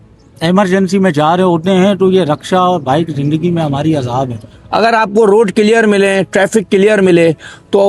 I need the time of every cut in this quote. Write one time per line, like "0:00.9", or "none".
none